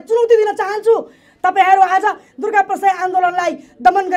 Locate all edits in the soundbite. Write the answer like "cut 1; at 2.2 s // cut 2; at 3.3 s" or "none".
none